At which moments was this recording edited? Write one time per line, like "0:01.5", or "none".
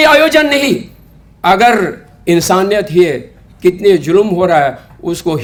none